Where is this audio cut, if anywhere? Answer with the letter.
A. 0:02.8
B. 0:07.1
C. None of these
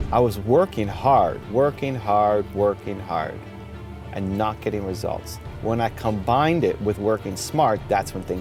C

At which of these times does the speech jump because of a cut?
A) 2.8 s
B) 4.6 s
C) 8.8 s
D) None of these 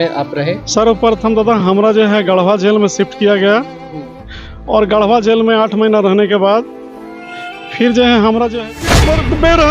C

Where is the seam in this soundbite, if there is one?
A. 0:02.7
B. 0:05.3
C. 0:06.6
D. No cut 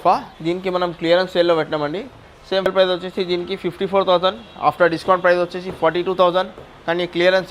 A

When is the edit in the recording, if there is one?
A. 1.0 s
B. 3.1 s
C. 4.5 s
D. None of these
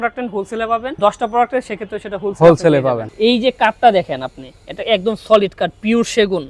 B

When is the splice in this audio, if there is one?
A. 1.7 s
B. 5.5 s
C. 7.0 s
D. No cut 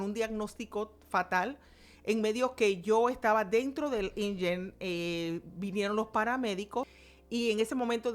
C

